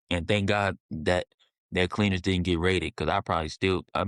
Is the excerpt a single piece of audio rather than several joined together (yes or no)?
yes